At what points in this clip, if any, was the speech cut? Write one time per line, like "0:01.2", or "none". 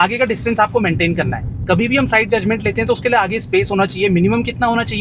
none